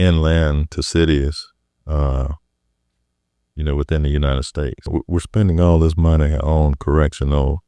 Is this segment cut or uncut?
cut